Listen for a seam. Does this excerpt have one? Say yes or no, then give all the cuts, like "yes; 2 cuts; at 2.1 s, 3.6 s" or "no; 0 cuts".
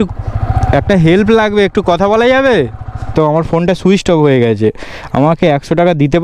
yes; 1 cut; at 3.1 s